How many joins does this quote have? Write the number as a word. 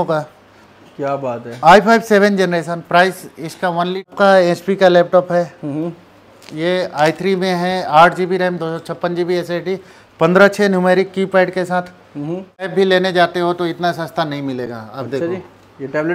two